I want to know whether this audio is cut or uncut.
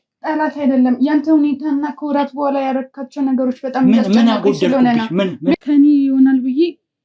cut